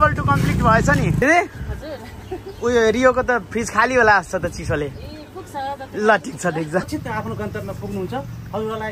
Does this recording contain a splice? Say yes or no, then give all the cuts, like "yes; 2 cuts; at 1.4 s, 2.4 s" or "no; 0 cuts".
yes; 2 cuts; at 1.2 s, 6.9 s